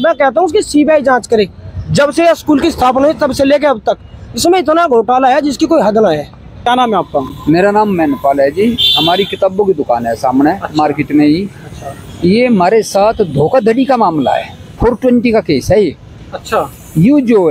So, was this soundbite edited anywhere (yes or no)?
yes